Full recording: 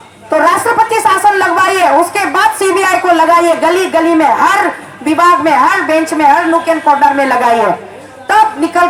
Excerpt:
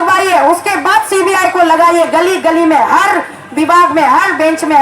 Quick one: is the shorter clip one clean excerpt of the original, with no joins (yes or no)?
yes